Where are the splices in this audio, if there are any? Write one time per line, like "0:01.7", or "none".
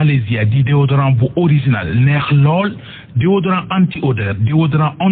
none